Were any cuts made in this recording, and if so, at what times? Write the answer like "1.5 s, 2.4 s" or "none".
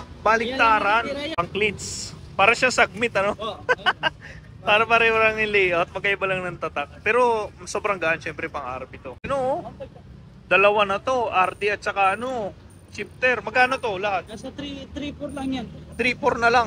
1.4 s, 9.2 s